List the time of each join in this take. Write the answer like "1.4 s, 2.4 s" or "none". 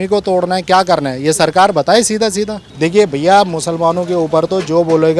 2.6 s